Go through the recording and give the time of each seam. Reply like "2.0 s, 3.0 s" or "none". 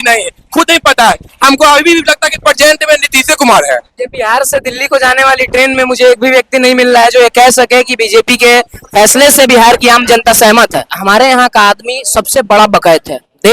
4.0 s, 10.9 s

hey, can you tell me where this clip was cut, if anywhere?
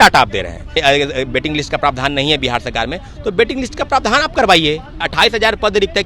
0.7 s, 5.1 s

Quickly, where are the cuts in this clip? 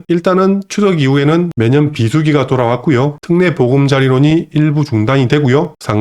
3.2 s

